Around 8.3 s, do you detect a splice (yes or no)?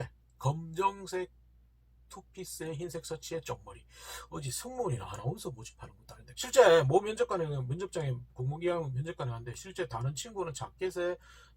no